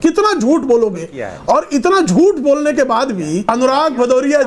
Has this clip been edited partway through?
yes; 1 cut; at 3.5 s

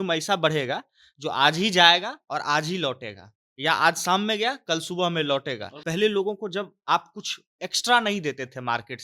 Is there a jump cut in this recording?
yes; 1 cut; at 5.7 s

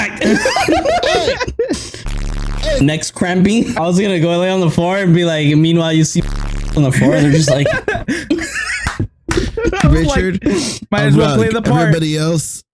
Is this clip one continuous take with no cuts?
no; 1 cut; at 3.8 s

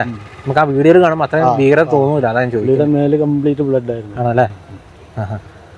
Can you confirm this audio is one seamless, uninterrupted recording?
yes; 0 cuts

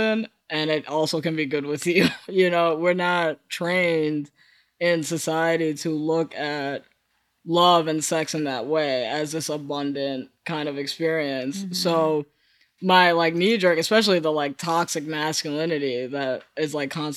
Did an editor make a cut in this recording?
no; 0 cuts

